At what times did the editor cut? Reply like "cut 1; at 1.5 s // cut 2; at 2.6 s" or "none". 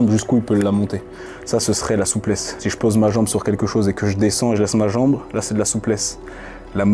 none